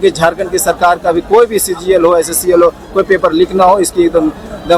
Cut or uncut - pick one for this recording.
uncut